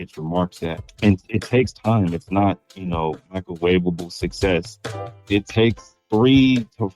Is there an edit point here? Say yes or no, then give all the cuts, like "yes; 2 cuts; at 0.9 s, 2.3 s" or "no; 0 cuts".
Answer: yes; 1 cut; at 5.1 s